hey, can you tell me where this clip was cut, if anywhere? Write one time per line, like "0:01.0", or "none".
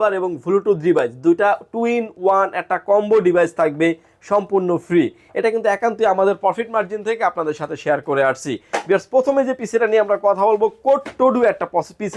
none